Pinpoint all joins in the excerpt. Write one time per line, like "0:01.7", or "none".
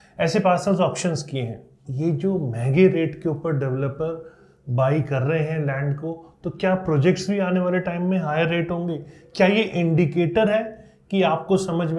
0:01.8

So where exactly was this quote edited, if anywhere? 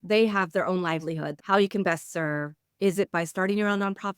0:01.3

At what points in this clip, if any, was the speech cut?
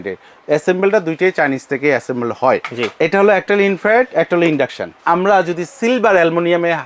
0:05.0

